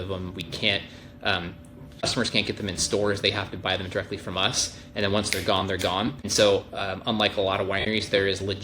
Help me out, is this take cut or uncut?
cut